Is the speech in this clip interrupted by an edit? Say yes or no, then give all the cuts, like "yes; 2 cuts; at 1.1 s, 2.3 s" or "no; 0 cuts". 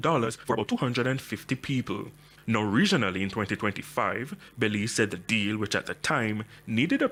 no; 0 cuts